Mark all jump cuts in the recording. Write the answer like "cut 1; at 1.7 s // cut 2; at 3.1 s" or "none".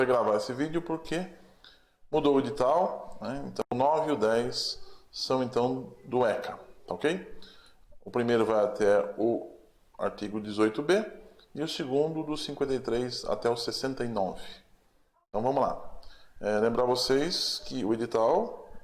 cut 1; at 3.6 s